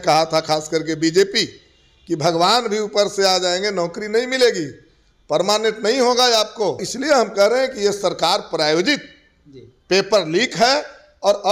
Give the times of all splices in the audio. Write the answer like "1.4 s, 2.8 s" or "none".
6.9 s